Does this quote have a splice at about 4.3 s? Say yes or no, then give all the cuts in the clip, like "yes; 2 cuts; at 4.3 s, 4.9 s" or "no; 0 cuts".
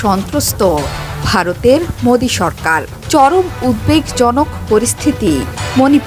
no; 0 cuts